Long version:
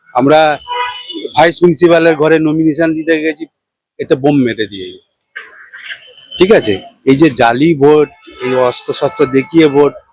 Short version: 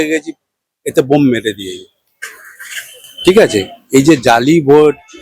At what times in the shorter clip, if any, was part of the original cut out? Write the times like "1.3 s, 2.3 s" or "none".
none